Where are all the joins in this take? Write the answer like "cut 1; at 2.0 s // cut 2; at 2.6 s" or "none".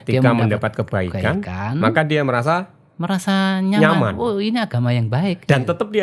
none

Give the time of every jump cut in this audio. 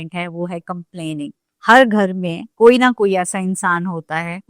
cut 1; at 1.4 s

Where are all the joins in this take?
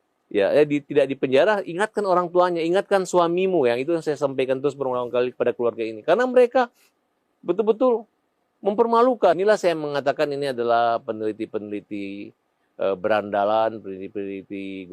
cut 1; at 9.4 s

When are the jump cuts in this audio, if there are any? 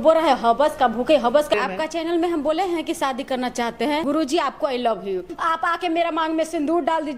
cut 1; at 1.5 s // cut 2; at 4.0 s // cut 3; at 5.3 s

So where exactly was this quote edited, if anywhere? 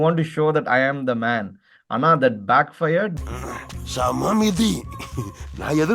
cut 1; at 3.2 s

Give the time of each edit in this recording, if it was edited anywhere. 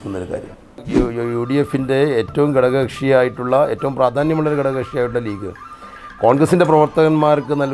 cut 1; at 0.9 s

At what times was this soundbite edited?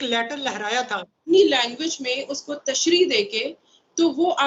cut 1; at 1.1 s

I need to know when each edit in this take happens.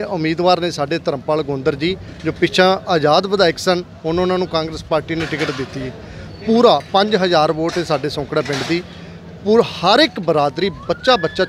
none

